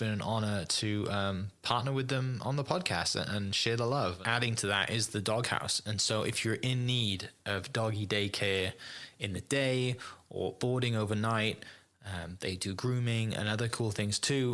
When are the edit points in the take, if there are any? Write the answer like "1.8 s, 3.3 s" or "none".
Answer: 4.2 s